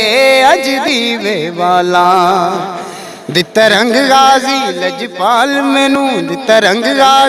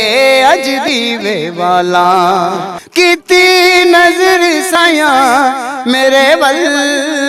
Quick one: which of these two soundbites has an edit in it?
second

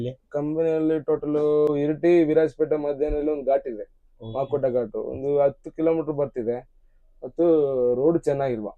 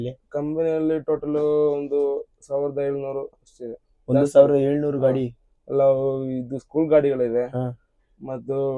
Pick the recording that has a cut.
first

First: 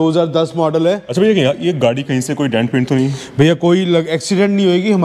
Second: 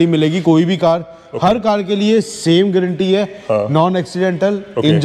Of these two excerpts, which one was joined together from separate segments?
first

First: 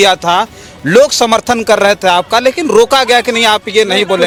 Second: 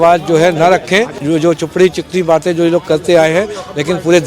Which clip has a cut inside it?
second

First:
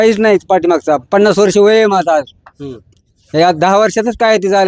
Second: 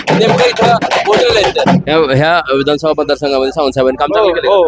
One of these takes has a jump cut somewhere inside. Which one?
second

